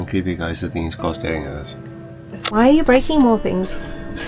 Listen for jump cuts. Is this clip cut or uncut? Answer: cut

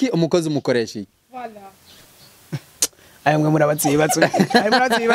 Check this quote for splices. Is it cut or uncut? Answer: uncut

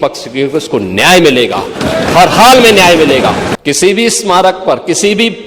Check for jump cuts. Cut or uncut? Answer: cut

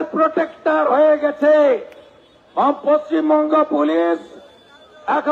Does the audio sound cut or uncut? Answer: uncut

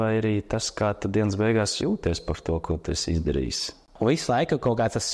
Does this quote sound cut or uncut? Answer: cut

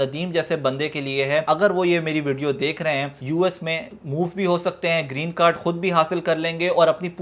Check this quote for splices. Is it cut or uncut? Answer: cut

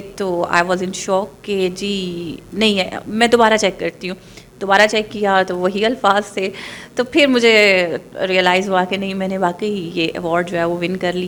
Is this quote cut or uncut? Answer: uncut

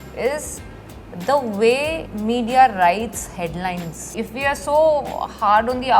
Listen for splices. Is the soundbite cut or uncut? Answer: cut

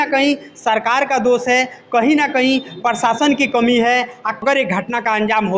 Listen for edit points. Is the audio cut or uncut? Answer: cut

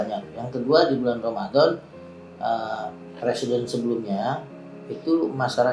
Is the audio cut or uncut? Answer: uncut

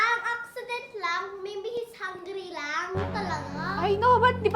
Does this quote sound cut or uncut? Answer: uncut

